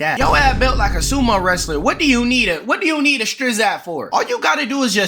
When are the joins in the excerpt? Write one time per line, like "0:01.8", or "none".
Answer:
0:04.0